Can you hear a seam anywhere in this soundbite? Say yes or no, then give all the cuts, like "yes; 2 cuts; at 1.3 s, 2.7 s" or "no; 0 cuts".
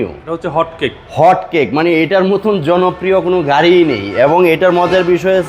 no; 0 cuts